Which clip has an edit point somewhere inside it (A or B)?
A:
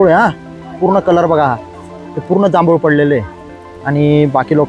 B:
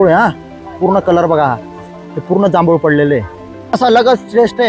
B